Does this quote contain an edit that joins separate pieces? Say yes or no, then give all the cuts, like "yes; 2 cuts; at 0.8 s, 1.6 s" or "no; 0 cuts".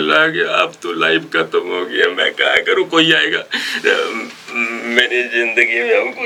no; 0 cuts